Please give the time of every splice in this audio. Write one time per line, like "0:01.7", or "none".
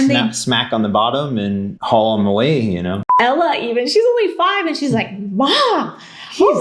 0:01.7
0:03.1